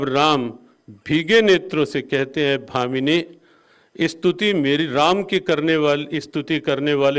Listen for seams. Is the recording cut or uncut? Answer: uncut